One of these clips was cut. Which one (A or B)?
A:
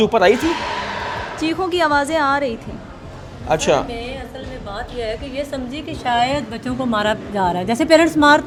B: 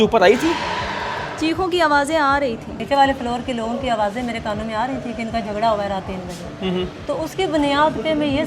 B